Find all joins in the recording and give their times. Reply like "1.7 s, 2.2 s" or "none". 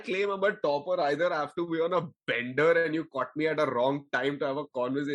none